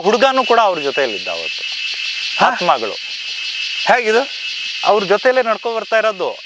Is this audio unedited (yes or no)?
yes